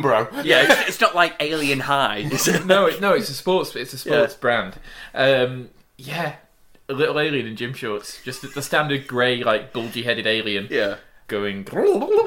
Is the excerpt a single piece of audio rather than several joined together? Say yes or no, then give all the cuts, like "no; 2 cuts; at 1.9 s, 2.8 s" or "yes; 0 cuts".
no; 1 cut; at 11.2 s